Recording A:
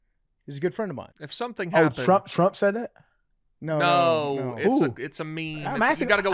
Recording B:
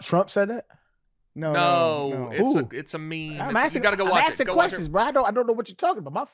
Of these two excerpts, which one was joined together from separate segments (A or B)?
A